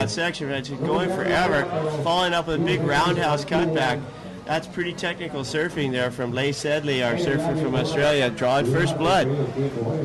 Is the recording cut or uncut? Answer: cut